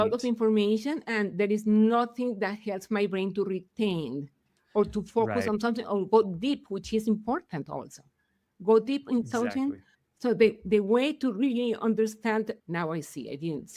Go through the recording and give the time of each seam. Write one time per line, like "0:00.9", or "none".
0:12.6